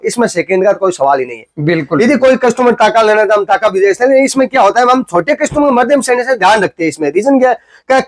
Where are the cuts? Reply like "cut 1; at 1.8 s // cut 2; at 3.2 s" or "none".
none